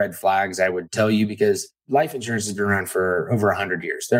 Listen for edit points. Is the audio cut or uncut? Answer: cut